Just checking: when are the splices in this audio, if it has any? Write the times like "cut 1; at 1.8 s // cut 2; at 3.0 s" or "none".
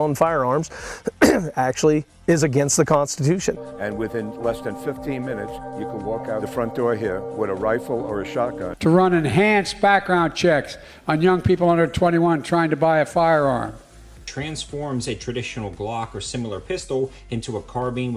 cut 1; at 3.6 s // cut 2; at 8.7 s // cut 3; at 14.3 s